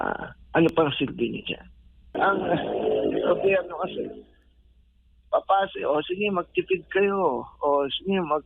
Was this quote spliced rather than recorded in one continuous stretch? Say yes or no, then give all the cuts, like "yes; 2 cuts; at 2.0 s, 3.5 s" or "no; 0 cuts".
yes; 1 cut; at 2.2 s